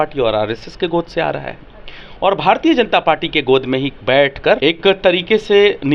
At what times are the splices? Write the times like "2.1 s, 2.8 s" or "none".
4.6 s